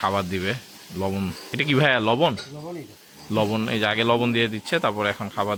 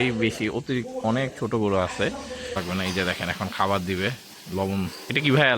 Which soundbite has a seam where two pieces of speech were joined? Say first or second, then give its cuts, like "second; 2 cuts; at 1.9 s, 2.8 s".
second; 1 cut; at 2.6 s